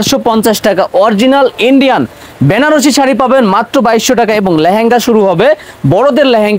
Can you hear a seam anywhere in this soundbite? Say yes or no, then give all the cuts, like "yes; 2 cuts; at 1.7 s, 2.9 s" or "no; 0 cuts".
no; 0 cuts